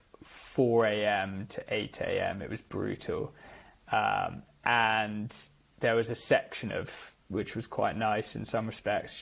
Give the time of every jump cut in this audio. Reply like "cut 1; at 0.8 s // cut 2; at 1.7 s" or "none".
none